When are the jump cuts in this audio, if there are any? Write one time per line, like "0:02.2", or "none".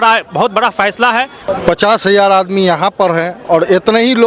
0:01.4